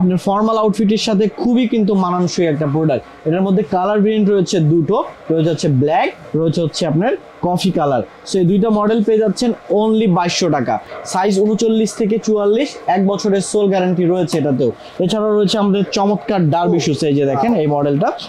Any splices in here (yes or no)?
no